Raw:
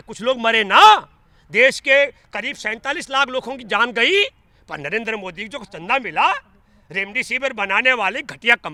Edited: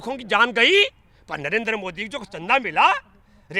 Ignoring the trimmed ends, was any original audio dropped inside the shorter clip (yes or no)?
no